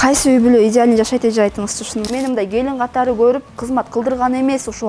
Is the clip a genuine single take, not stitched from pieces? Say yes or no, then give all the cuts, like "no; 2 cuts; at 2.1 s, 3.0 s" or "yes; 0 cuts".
no; 1 cut; at 2.1 s